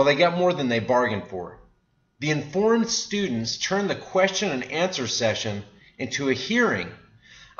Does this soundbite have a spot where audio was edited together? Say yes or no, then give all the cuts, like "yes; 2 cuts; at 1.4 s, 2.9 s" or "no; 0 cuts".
no; 0 cuts